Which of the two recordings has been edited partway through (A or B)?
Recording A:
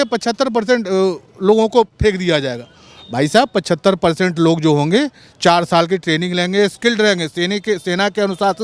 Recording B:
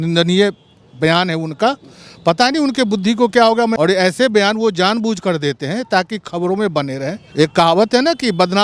B